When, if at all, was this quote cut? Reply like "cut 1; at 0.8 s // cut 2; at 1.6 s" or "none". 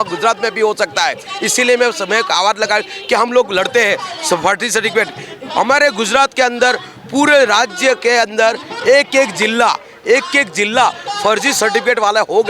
none